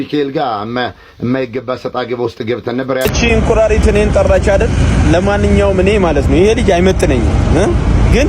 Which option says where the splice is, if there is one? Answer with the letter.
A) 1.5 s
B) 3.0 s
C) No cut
B